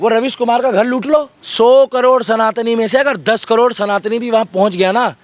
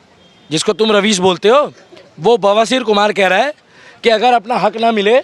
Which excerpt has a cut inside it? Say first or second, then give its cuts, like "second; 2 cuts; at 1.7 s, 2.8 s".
first; 1 cut; at 1.4 s